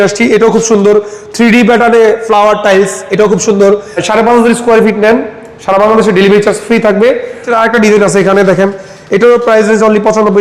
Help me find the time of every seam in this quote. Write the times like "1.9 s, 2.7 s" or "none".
3.9 s, 7.5 s